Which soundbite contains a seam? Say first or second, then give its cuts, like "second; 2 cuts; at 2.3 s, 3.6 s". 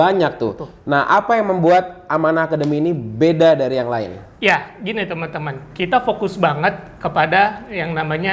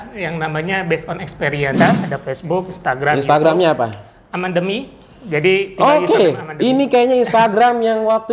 second; 1 cut; at 1.8 s